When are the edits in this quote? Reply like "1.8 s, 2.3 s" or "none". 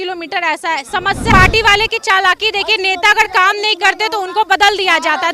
1.3 s